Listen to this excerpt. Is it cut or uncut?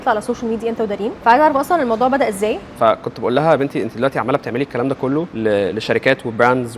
cut